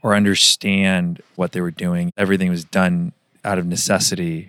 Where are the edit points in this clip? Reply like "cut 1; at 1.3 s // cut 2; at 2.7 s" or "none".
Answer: cut 1; at 2.1 s

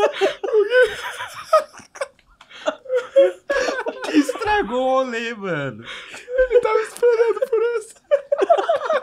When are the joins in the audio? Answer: none

